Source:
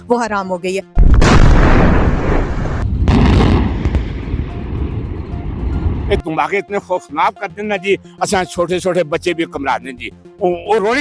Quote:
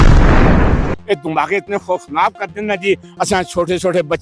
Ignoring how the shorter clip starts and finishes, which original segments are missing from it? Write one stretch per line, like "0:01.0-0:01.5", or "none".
0:02.3-0:05.9